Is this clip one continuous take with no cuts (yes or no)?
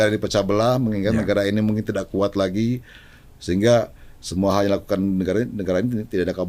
yes